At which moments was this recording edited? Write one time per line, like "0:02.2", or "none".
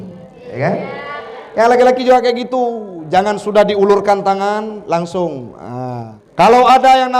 0:06.1